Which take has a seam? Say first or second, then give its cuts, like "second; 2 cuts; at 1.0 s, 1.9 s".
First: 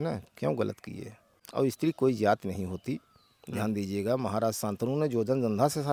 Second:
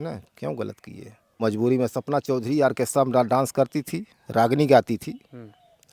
second; 1 cut; at 1.4 s